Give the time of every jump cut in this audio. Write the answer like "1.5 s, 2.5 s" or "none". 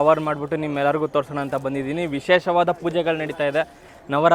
none